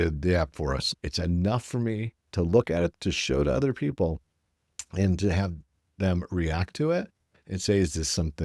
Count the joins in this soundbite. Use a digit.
2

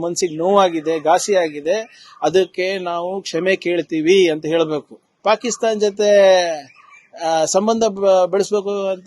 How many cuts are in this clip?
1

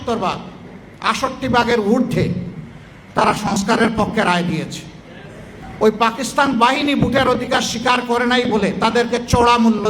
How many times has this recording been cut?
1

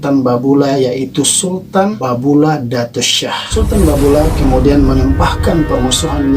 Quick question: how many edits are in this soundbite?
2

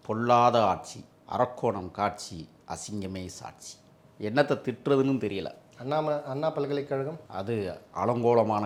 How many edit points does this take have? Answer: 0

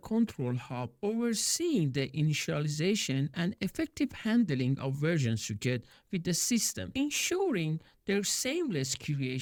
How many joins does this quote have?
0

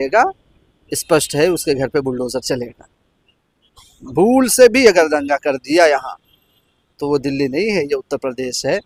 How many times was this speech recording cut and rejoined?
0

